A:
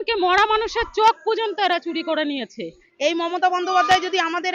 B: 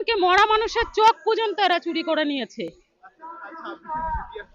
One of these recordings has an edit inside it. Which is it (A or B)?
A